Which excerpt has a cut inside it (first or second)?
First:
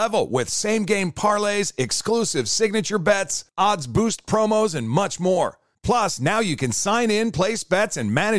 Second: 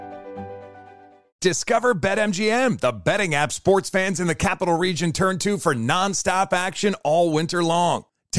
second